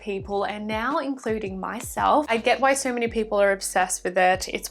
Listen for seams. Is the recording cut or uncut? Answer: cut